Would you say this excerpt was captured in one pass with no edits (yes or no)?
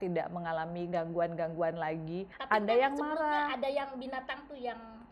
no